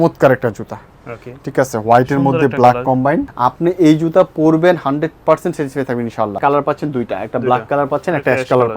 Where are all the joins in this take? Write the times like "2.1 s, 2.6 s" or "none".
3.3 s, 6.4 s